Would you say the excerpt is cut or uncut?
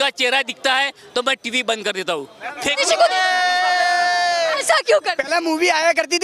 cut